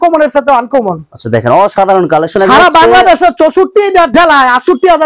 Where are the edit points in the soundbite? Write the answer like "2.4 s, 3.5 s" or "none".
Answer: none